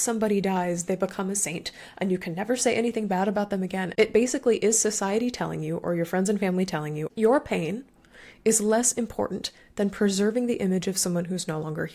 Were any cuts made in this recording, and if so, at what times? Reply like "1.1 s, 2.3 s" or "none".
3.9 s, 7.0 s